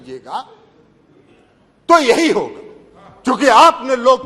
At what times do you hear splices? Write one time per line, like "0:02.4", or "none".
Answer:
none

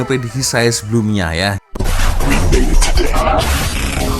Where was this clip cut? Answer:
0:01.6

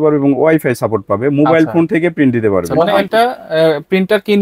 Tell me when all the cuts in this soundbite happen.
0:02.9

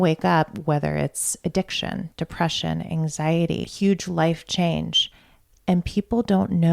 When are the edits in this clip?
0:03.7

